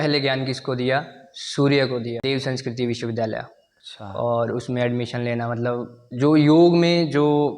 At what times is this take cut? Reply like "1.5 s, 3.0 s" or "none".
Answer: 2.2 s